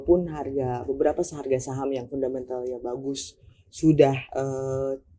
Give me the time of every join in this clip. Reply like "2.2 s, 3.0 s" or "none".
none